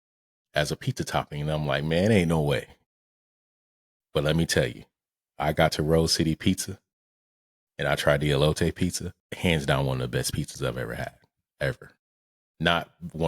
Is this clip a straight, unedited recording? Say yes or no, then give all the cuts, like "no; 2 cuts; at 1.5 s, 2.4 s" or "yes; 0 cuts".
no; 1 cut; at 9.2 s